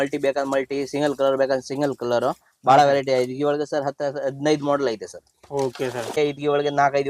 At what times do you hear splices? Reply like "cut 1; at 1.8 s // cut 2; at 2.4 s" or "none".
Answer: cut 1; at 6.2 s